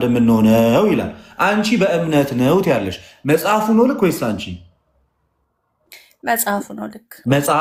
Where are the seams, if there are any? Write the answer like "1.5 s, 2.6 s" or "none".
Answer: none